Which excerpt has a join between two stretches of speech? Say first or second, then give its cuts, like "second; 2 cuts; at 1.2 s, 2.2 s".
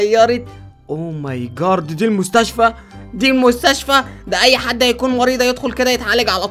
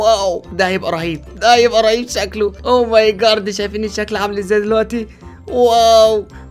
second; 1 cut; at 2.6 s